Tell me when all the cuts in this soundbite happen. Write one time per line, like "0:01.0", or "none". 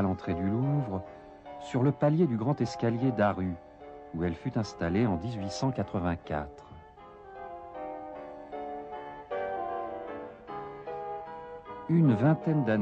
none

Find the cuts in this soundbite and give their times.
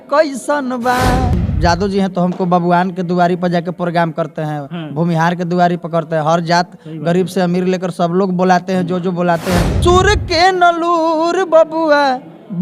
0:01.5
0:09.7

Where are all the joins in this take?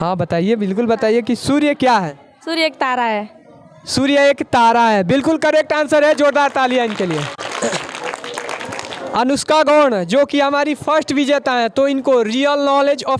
0:08.9

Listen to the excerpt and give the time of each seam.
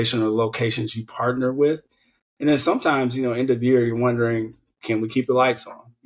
0:04.7

